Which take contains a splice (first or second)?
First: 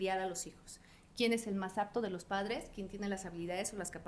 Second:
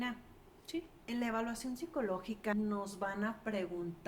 second